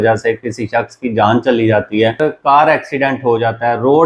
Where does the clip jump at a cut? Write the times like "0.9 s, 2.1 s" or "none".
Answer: 2.2 s